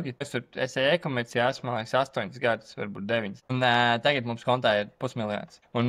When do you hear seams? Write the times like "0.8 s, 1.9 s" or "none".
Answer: 3.4 s